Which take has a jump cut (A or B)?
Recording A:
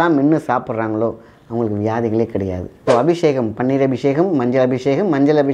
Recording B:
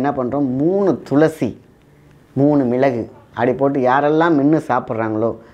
A